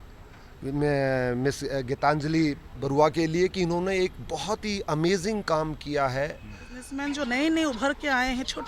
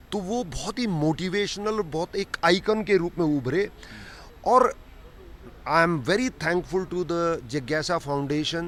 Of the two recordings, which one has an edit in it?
first; 1 cut; at 6.9 s

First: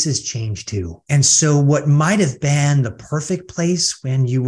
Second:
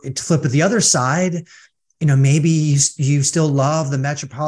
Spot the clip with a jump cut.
first; 1 cut; at 1.0 s

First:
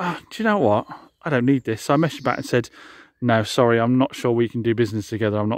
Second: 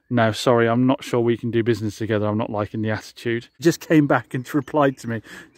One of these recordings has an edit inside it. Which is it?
second; 1 cut; at 3.6 s

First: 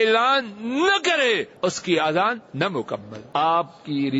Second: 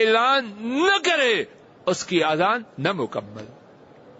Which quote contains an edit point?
first; 2 cuts; at 1.5 s, 3.1 s

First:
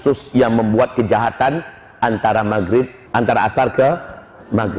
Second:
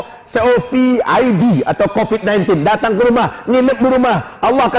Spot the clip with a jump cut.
first; 1 cut; at 3.0 s

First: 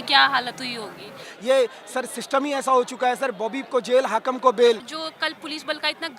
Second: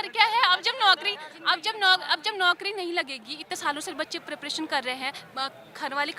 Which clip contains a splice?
first; 2 cuts; at 1.2 s, 4.9 s

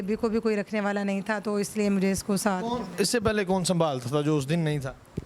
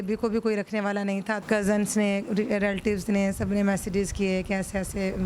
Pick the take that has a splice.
second; 1 cut; at 1.4 s

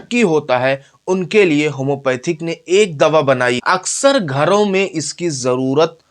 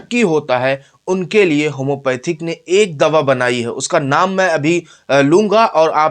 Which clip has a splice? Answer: first; 1 cut; at 3.6 s

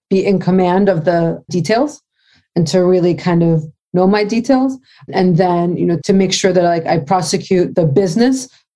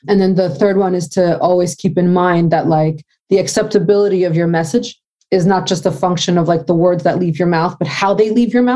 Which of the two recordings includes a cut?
first; 4 cuts; at 1.5 s, 5.1 s, 6.0 s, 7.7 s

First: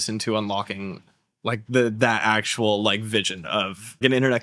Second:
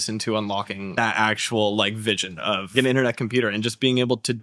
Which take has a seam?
second; 2 cuts; at 1.0 s, 2.6 s

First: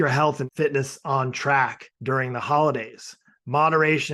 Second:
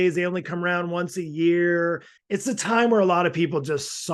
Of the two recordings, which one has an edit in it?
second; 1 cut; at 2.1 s

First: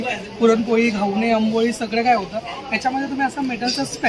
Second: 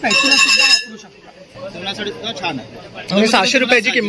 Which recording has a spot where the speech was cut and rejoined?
second; 1 cut; at 1.5 s

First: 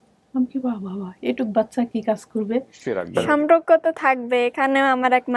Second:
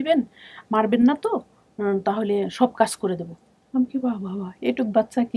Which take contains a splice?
first; 1 cut; at 3.1 s

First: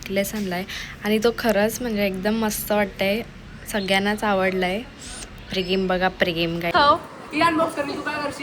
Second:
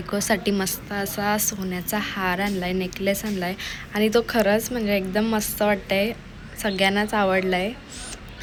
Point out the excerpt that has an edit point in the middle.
first; 1 cut; at 6.7 s

